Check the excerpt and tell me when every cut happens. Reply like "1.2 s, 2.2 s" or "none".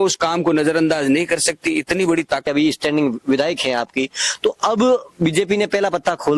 2.5 s